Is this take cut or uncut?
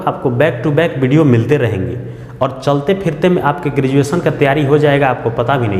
uncut